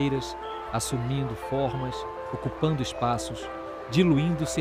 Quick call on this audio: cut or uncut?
uncut